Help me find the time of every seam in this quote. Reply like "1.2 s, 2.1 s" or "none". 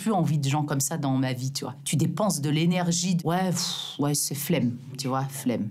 none